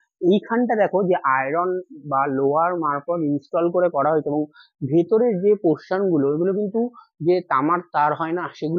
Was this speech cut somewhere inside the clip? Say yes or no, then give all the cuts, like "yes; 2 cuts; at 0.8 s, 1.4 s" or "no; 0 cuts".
no; 0 cuts